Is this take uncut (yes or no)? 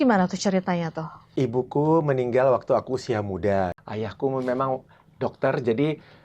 no